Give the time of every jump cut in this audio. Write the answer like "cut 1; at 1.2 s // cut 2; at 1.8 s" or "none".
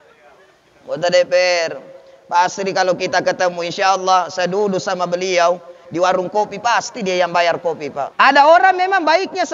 cut 1; at 8.1 s

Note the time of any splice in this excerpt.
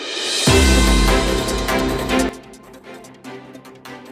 cut 1; at 2.3 s

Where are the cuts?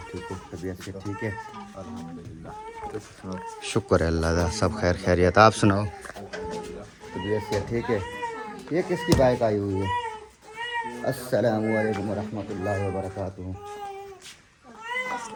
none

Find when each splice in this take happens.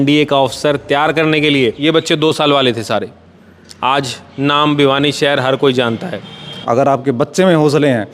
cut 1; at 1.8 s // cut 2; at 6.6 s

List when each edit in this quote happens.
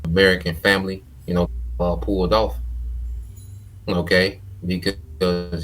cut 1; at 1.6 s

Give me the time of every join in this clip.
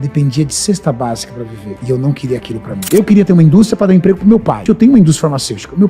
cut 1; at 2.8 s // cut 2; at 4.6 s

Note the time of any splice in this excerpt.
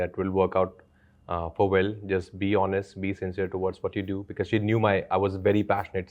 none

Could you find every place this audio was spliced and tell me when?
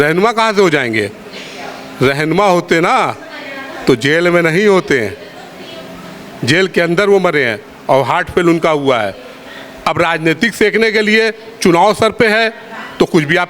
none

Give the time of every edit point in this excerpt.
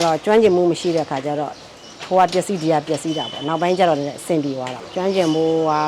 none

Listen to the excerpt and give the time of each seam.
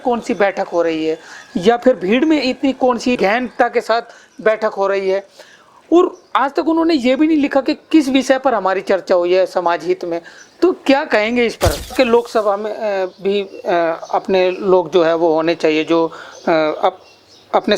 cut 1; at 3.2 s // cut 2; at 11.9 s

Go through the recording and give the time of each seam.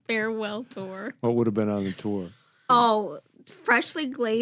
cut 1; at 2.7 s

